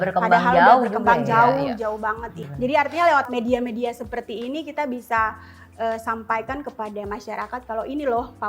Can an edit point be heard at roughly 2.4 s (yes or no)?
yes